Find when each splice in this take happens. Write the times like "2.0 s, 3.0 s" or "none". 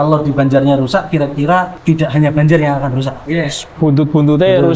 1.7 s, 3.2 s